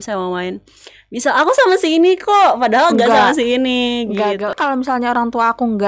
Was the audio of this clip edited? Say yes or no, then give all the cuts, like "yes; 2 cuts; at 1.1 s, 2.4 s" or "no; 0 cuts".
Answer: yes; 1 cut; at 4.5 s